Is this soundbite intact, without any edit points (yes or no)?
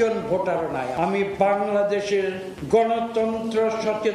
no